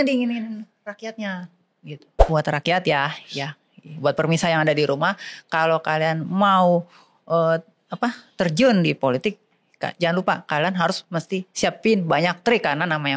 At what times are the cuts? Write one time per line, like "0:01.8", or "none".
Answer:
0:02.3